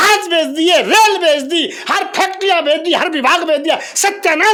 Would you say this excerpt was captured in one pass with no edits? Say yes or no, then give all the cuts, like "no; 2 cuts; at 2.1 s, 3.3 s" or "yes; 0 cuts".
yes; 0 cuts